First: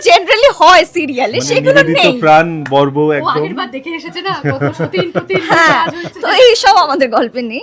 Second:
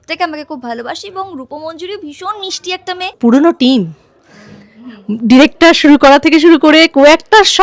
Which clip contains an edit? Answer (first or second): second